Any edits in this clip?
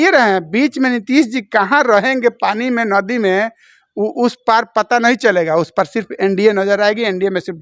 no; 0 cuts

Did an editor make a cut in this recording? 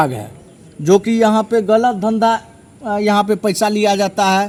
no; 0 cuts

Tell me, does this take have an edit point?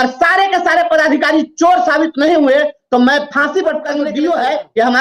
yes; 1 cut; at 4.0 s

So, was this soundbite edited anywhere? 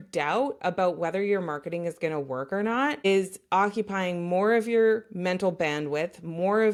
no; 0 cuts

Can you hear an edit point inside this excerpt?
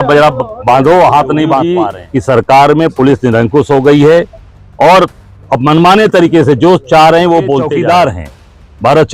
yes; 2 cuts; at 1.9 s, 7.7 s

